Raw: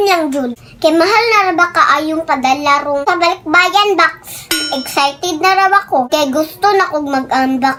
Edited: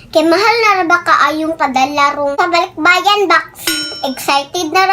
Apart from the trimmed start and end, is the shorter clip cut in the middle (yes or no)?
no